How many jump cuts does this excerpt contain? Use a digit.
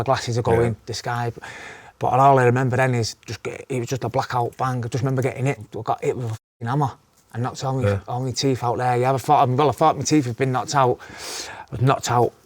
2